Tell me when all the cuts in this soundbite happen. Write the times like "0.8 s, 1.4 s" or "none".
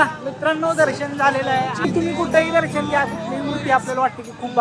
1.8 s